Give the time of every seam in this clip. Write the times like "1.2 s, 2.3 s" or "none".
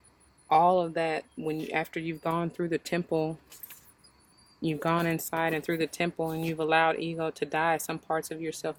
none